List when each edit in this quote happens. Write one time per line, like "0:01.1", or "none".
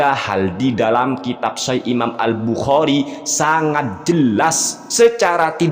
0:04.8